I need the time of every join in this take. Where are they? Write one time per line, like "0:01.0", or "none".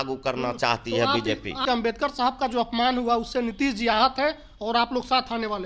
0:01.6